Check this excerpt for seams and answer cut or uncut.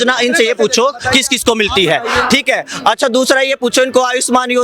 uncut